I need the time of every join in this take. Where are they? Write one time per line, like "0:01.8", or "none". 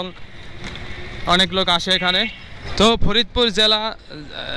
0:02.6

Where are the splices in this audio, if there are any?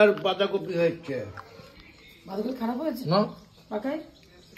none

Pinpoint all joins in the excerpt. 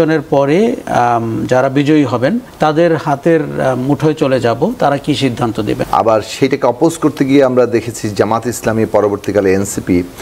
0:00.8
0:02.5
0:05.8

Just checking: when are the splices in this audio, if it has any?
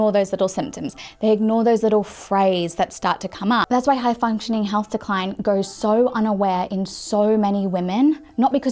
0:03.6

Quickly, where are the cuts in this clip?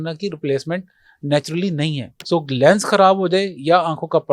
0:02.1

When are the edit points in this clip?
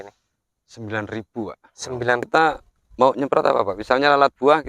0:02.2

